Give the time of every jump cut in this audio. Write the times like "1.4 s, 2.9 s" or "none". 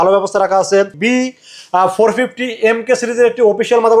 0.9 s